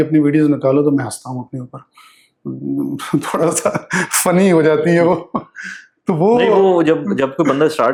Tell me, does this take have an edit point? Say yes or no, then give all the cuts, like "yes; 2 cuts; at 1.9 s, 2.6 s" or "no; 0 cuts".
no; 0 cuts